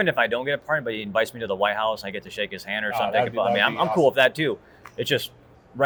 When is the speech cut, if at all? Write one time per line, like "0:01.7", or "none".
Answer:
none